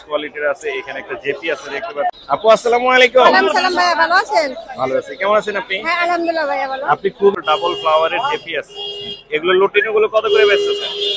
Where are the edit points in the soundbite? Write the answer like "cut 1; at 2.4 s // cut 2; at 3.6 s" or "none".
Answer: cut 1; at 2.2 s // cut 2; at 7.3 s